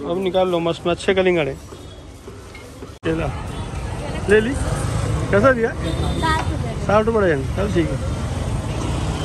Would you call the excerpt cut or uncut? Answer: uncut